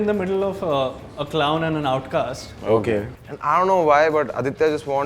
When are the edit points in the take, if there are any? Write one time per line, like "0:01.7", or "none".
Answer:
0:03.1